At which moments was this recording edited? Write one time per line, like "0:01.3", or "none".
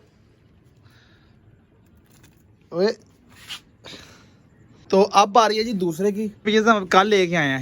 0:04.9
0:06.5